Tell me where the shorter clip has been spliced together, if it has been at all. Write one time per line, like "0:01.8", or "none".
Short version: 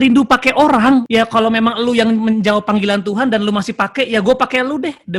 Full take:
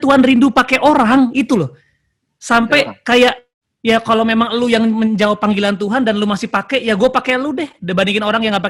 0:01.1